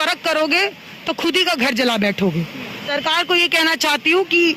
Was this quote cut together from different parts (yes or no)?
yes